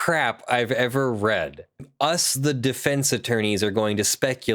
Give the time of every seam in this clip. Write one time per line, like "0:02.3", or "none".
0:01.9